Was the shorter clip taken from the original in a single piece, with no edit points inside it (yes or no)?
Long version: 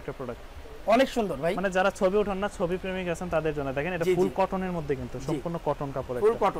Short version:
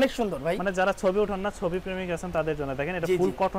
yes